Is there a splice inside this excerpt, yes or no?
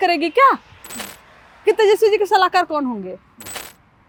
no